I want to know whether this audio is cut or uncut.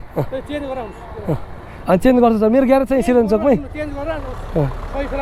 uncut